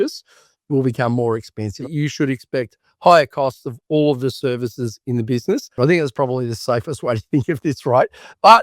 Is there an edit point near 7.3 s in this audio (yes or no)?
no